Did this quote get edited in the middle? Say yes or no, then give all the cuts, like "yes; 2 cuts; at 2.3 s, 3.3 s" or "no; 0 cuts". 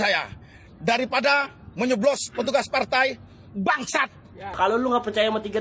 yes; 1 cut; at 4.6 s